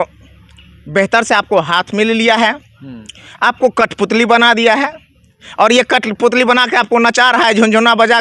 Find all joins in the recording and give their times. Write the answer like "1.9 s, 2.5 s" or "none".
none

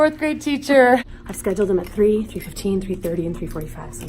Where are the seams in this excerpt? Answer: 1.2 s

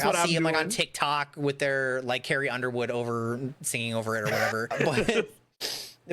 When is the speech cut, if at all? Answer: 4.7 s

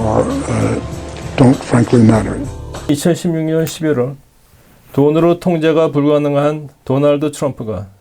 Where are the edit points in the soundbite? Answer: 2.9 s

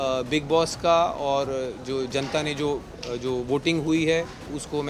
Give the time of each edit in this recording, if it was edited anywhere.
none

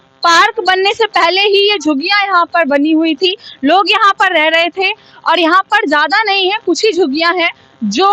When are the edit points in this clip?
none

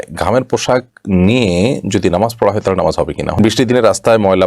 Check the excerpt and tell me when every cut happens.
3.4 s

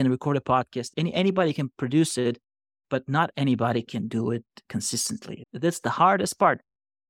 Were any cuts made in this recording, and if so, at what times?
0.9 s, 5.3 s

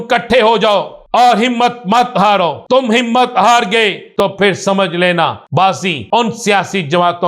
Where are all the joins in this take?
1.0 s, 2.6 s, 4.1 s, 5.6 s

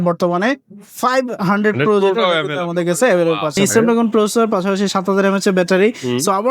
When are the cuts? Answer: 3.6 s

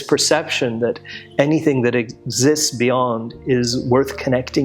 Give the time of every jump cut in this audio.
none

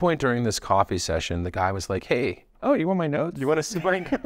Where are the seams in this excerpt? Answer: none

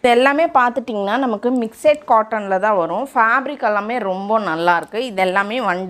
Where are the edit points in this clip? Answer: none

